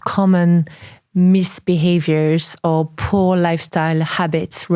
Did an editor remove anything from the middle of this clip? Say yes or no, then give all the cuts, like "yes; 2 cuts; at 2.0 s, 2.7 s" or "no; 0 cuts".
no; 0 cuts